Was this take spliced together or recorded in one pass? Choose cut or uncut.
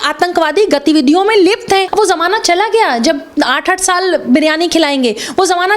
cut